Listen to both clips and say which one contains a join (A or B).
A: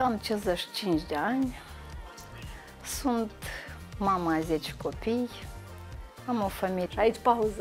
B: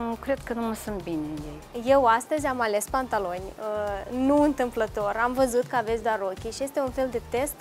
B